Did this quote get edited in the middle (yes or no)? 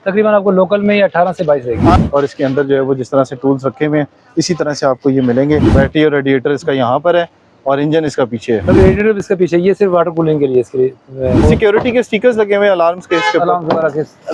yes